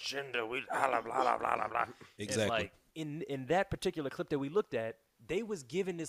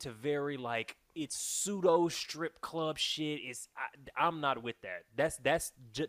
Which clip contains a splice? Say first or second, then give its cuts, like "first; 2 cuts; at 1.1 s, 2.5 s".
first; 2 cuts; at 2.8 s, 5.1 s